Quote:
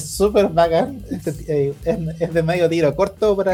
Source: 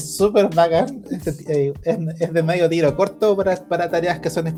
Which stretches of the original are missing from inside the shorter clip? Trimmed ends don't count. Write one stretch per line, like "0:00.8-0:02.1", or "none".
none